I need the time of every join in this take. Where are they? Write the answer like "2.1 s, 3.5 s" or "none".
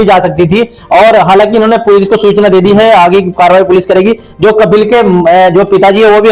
none